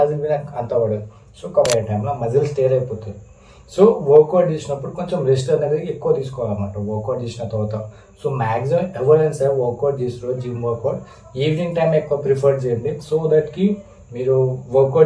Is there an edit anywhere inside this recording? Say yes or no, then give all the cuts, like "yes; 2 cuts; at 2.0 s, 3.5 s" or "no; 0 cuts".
yes; 1 cut; at 1.7 s